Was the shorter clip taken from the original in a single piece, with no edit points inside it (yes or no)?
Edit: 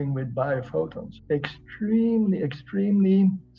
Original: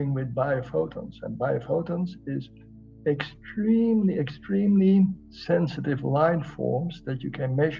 no